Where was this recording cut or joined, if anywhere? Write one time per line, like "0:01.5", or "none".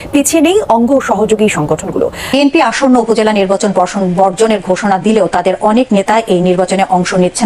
0:02.2